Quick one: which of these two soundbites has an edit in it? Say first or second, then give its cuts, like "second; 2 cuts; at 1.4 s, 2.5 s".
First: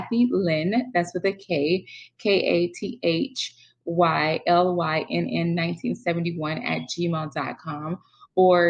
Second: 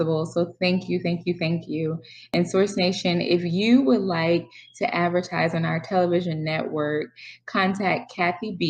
second; 1 cut; at 2.3 s